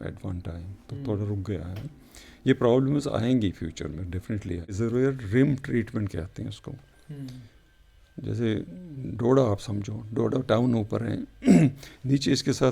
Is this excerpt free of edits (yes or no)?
no